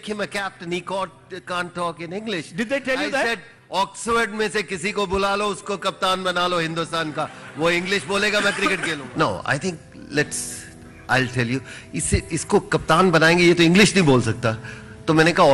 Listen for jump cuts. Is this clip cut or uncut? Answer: cut